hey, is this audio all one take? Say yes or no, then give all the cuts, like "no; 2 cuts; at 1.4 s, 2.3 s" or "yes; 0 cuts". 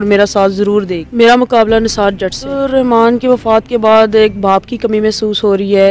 no; 2 cuts; at 1.0 s, 2.6 s